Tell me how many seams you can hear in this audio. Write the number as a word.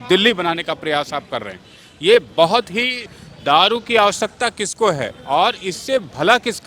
one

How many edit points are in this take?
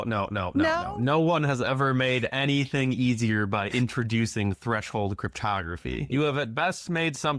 one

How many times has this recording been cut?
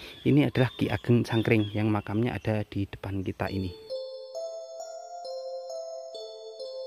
zero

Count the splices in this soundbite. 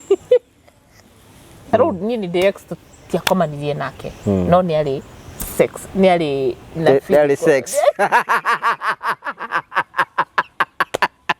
one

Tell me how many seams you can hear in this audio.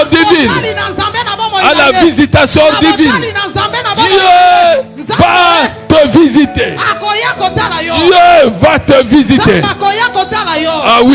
zero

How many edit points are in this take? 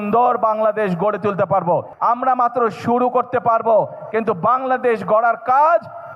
one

